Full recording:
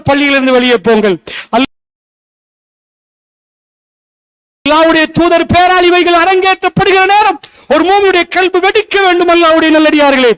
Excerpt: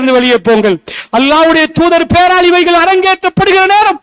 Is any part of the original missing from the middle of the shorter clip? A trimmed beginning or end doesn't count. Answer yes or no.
yes